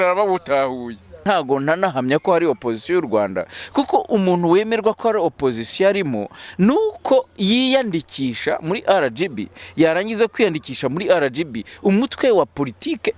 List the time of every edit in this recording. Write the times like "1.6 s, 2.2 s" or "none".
1.2 s